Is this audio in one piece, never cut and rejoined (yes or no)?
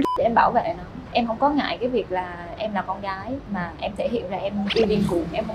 no